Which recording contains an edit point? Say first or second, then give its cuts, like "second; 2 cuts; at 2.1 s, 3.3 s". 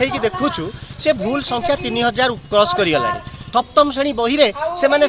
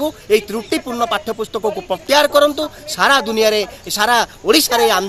first; 1 cut; at 3.3 s